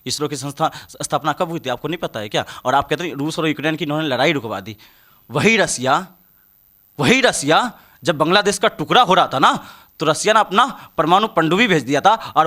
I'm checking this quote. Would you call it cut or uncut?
uncut